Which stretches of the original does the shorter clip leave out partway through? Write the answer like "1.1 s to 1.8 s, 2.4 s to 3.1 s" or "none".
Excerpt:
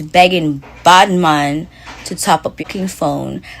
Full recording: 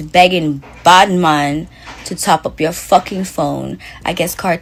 2.6 s to 3.0 s